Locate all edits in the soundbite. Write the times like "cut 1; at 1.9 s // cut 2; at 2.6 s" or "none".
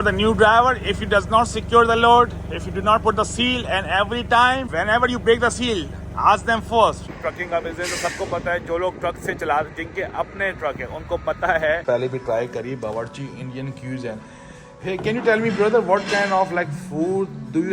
cut 1; at 7.1 s // cut 2; at 11.8 s